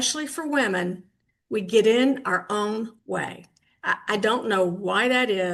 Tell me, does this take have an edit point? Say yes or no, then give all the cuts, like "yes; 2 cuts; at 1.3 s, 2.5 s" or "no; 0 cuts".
no; 0 cuts